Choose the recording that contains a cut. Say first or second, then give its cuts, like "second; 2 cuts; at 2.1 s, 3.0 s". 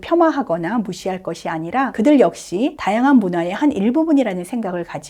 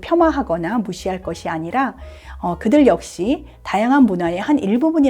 first; 2 cuts; at 1.9 s, 2.8 s